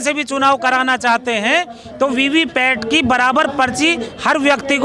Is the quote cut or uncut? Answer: uncut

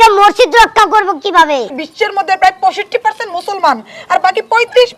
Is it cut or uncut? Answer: cut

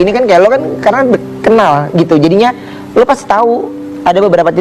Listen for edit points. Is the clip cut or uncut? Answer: uncut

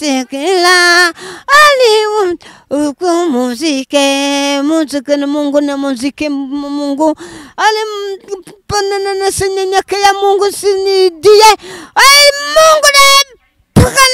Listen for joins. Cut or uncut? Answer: uncut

